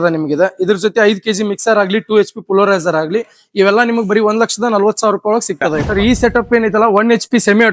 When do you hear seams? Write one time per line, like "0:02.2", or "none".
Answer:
0:05.8

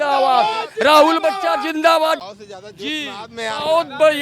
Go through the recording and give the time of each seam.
0:02.2

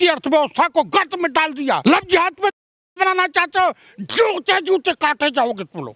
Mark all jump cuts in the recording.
0:01.8

